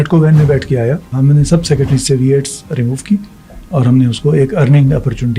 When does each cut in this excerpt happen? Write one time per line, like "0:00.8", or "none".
0:01.1